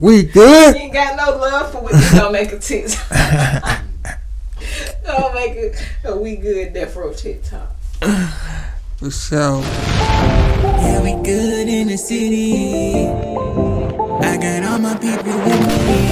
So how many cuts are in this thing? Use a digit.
1